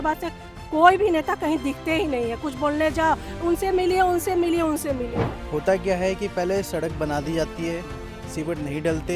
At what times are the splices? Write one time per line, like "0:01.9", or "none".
0:05.3